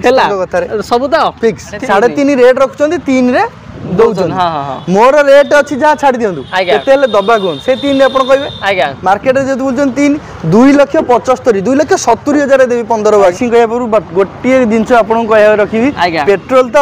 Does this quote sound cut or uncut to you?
cut